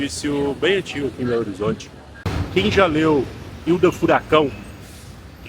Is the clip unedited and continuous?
no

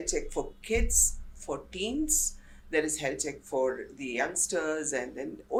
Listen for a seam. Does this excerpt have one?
no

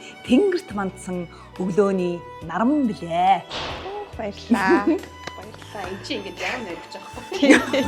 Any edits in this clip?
no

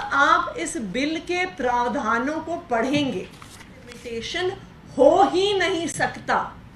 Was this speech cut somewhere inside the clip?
yes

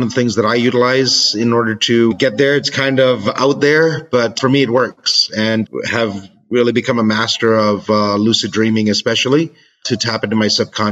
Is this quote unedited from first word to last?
no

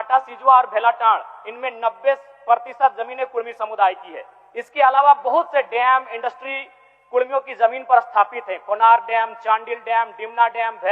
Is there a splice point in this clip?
no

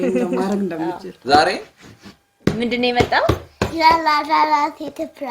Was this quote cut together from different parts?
yes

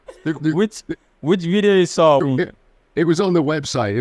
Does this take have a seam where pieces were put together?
no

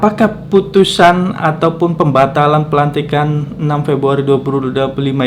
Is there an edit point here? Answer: no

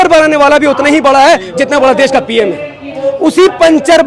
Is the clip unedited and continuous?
yes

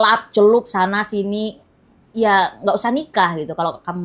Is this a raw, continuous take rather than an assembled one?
yes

